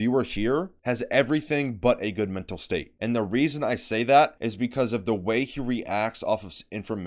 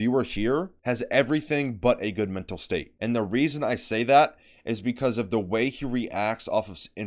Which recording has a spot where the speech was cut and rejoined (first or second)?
first